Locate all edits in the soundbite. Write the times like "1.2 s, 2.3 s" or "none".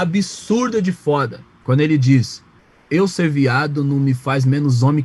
none